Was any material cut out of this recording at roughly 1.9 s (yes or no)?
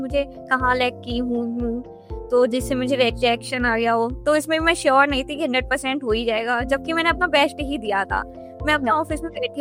no